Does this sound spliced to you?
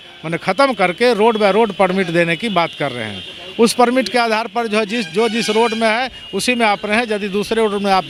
no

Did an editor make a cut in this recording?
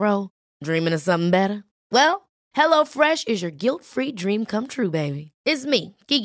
no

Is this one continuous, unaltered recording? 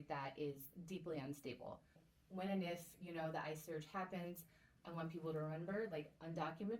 no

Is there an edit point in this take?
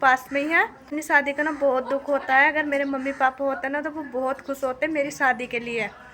yes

